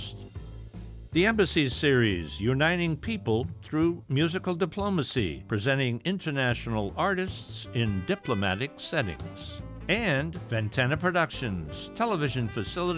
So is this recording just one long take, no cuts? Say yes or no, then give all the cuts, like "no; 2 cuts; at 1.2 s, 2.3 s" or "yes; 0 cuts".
no; 2 cuts; at 5.4 s, 10.4 s